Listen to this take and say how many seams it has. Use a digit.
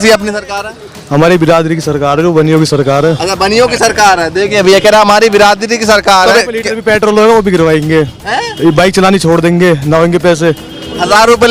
1